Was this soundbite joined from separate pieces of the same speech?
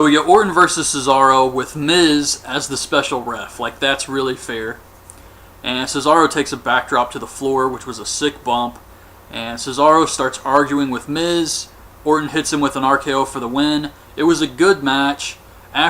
yes; 1 cut; at 6.5 s

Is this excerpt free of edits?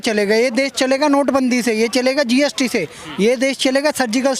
yes; 0 cuts

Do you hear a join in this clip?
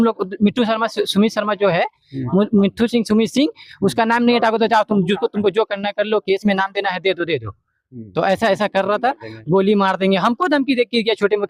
no; 0 cuts

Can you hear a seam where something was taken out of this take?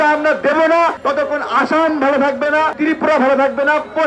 yes; 2 cuts; at 1.0 s, 2.7 s

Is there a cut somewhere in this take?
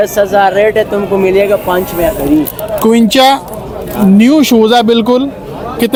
no; 0 cuts

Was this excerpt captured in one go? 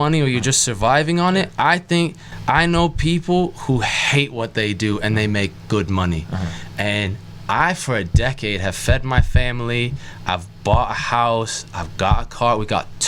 yes; 0 cuts

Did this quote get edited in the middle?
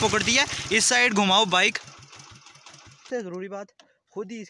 yes; 1 cut; at 3.0 s

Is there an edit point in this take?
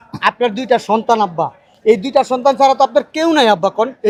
no; 0 cuts

